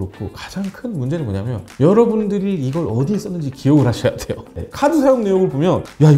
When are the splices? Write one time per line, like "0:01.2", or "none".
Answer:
0:04.7